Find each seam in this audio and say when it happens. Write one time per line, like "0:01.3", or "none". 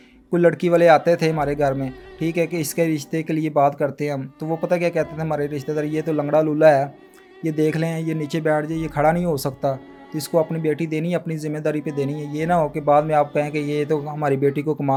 none